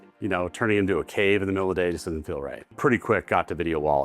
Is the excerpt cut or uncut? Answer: cut